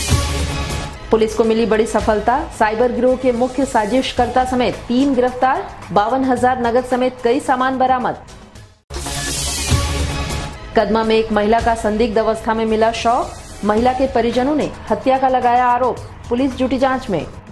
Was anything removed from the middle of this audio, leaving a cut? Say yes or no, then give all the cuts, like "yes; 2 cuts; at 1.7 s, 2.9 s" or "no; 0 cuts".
no; 0 cuts